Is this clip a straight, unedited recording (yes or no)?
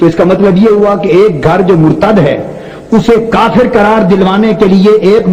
yes